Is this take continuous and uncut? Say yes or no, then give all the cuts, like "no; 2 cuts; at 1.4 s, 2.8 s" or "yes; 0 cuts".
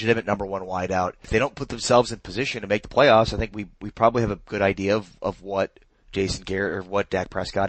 no; 1 cut; at 1.2 s